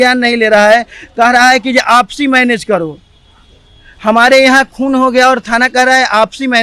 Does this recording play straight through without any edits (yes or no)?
yes